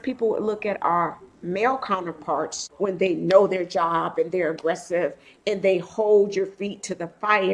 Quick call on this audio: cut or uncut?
cut